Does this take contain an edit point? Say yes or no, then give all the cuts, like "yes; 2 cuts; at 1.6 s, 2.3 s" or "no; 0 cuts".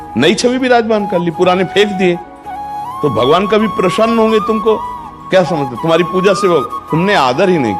no; 0 cuts